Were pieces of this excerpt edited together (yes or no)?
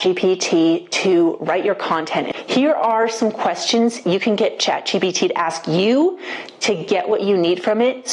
yes